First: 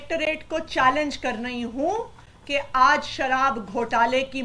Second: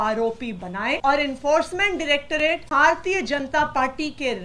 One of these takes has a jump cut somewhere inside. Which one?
second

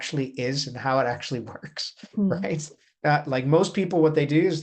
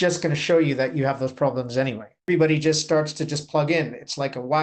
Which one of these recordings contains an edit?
second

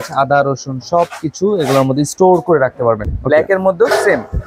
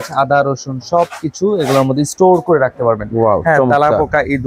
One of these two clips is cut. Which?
first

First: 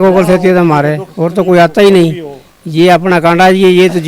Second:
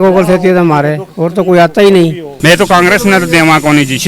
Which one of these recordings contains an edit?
second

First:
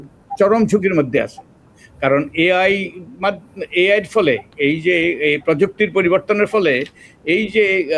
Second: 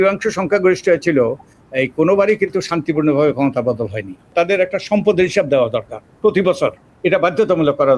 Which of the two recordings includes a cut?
second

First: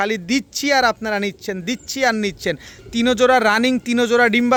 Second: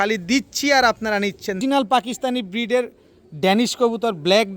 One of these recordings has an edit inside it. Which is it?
second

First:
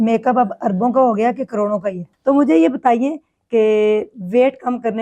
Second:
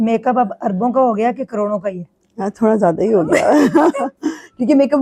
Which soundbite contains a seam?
first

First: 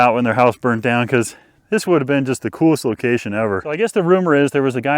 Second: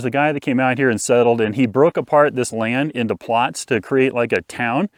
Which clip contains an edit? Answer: first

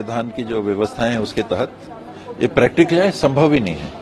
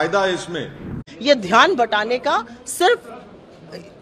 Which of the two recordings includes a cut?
second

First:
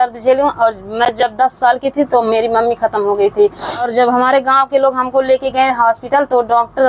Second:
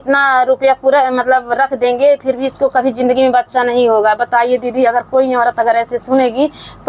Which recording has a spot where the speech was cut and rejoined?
first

